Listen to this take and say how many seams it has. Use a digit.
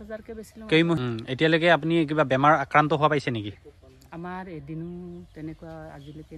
1